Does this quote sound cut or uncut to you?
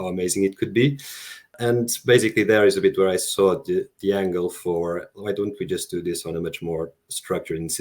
cut